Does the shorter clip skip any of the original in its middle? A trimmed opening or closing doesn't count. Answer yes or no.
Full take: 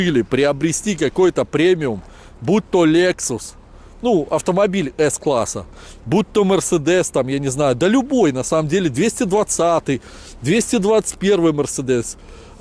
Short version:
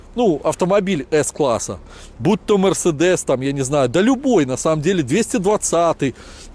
no